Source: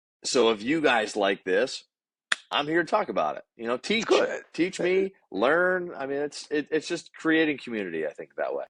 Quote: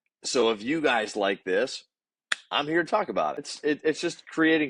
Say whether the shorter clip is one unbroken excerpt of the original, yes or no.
no